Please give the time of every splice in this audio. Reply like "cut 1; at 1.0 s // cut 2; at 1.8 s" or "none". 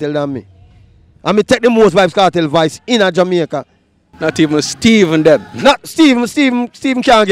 none